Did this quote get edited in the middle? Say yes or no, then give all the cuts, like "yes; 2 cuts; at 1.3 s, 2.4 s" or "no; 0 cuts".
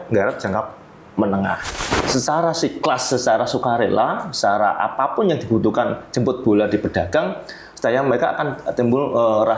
yes; 1 cut; at 1.7 s